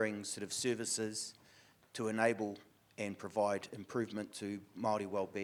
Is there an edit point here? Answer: no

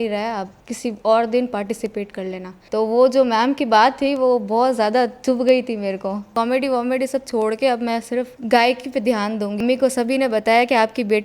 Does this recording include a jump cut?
yes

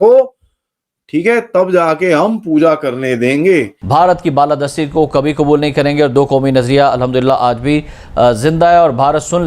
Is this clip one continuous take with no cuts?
no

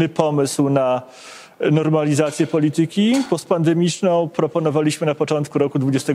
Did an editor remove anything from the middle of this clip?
no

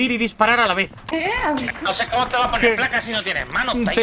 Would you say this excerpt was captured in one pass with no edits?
no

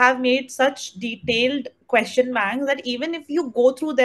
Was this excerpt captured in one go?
no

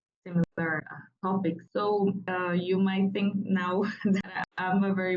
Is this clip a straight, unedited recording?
no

